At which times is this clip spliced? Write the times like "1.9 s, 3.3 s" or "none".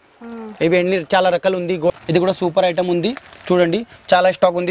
1.9 s